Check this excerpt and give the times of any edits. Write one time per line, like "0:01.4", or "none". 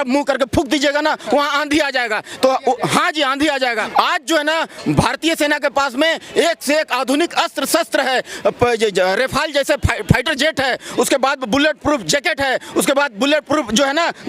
0:03.8

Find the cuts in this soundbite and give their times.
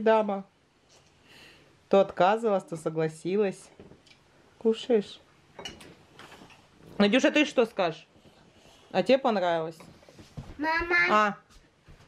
none

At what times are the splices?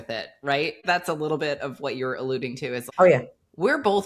0:00.8
0:02.8

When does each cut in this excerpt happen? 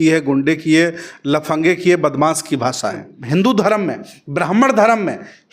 0:03.1

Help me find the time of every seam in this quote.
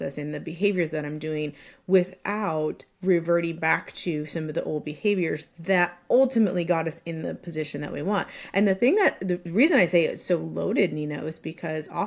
none

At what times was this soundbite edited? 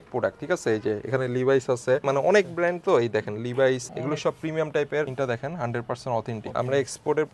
0:02.0
0:03.9
0:05.1
0:06.4

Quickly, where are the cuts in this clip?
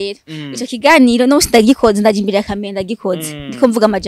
none

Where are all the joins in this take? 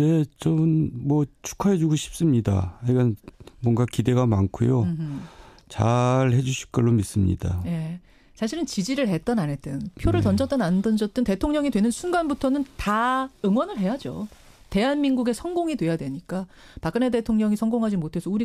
0:15.4

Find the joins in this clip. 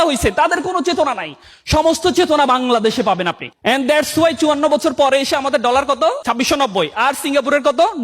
0:03.4
0:06.2

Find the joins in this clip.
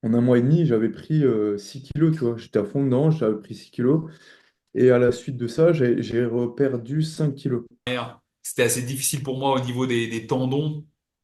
0:07.9

